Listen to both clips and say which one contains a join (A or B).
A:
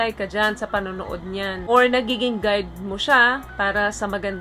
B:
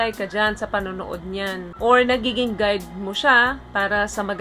A